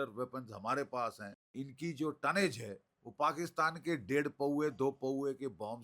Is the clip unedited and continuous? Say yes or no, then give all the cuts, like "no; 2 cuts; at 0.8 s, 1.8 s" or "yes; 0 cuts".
no; 1 cut; at 1.5 s